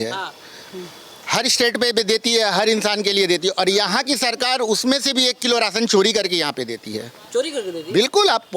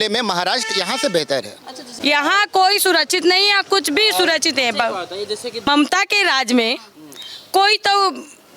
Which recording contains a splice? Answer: second; 2 cuts; at 1.9 s, 5.7 s

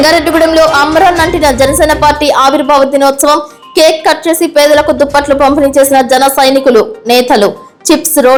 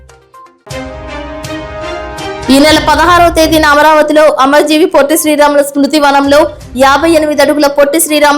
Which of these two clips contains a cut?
second; 1 cut; at 2.3 s

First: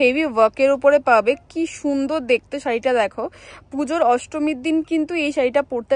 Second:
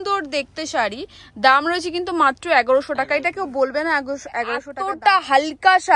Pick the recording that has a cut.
second; 1 cut; at 4.7 s

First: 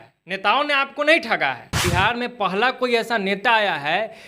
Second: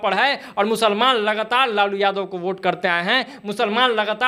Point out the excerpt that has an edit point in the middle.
first; 1 cut; at 1.7 s

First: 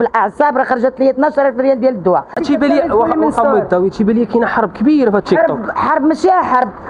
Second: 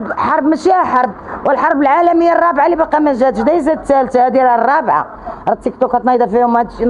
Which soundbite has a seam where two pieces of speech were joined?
first; 1 cut; at 2.3 s

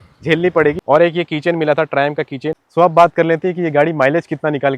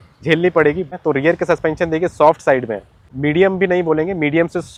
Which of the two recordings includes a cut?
first; 2 cuts; at 0.8 s, 2.6 s

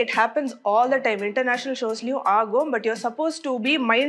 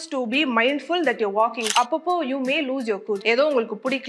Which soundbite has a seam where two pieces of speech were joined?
second; 2 cuts; at 1.7 s, 3.2 s

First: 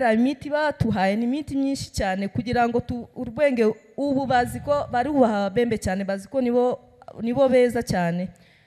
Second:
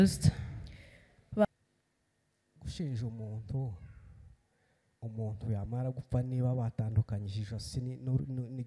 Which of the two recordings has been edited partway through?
second; 1 cut; at 1.5 s

